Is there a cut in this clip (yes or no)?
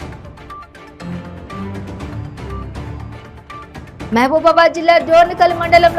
no